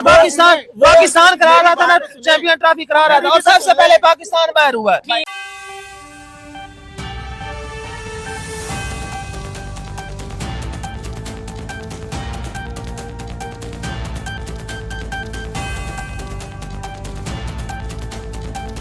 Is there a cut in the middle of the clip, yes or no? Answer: no